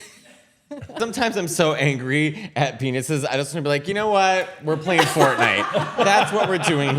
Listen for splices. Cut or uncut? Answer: cut